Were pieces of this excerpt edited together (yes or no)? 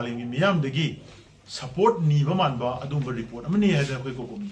no